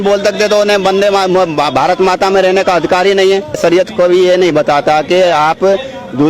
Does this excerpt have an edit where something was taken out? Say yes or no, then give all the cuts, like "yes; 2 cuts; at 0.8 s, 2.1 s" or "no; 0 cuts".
yes; 1 cut; at 3.6 s